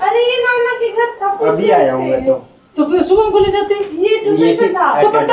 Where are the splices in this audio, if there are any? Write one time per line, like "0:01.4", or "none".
none